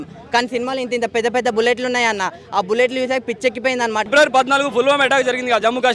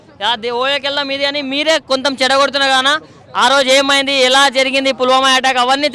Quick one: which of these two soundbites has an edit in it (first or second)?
first